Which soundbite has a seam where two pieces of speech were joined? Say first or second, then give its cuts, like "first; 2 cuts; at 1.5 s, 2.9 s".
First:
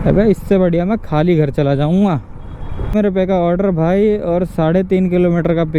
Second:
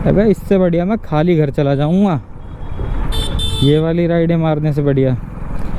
first; 1 cut; at 2.9 s